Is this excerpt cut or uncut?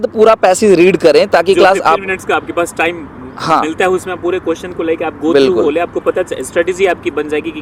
uncut